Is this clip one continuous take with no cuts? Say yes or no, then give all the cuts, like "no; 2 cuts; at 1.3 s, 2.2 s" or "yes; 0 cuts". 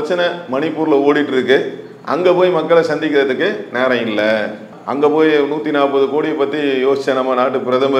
yes; 0 cuts